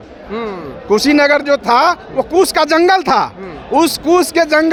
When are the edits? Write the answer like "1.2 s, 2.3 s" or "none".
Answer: none